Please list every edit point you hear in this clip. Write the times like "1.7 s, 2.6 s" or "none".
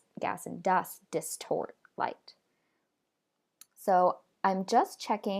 none